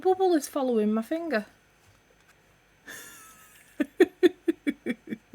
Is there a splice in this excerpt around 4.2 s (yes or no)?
no